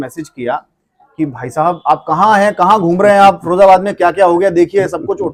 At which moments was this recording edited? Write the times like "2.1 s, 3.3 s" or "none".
none